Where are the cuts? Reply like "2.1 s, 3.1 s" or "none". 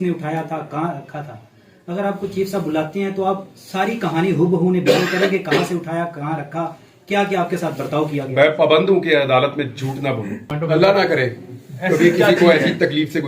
10.5 s